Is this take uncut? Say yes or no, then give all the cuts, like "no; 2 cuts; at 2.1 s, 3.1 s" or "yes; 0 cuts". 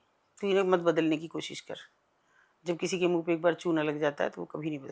yes; 0 cuts